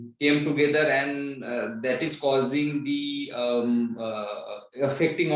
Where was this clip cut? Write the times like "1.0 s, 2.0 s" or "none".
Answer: none